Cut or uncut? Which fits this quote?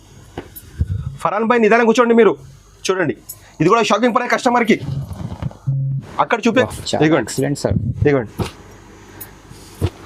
cut